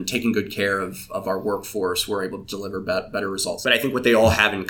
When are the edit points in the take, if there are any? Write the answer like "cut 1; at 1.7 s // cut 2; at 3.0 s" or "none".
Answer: cut 1; at 3.5 s